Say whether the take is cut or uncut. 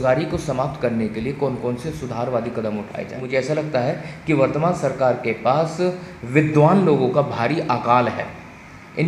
cut